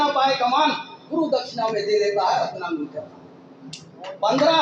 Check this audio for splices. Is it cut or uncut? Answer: uncut